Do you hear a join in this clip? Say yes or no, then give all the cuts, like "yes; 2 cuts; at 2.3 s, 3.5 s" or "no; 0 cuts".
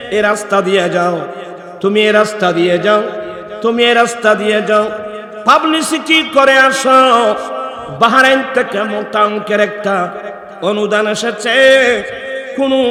no; 0 cuts